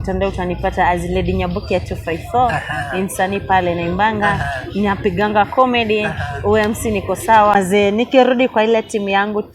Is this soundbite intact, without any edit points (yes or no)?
no